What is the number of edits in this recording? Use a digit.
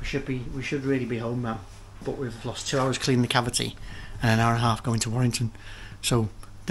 0